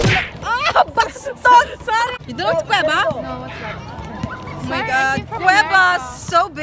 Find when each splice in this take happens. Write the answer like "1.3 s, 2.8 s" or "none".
2.2 s